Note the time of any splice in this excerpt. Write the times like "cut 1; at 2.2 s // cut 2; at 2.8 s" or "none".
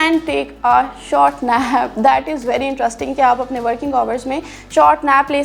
none